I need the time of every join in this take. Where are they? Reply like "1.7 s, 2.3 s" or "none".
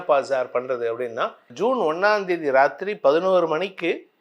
1.5 s